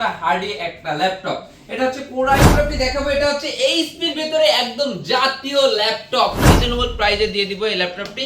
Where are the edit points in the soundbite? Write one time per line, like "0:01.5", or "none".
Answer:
0:02.5
0:06.4